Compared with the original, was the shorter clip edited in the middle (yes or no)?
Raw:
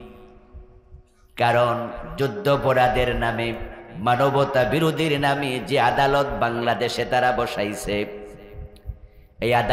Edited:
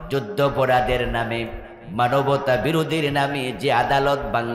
no